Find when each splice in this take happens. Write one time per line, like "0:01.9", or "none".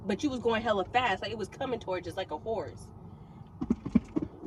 none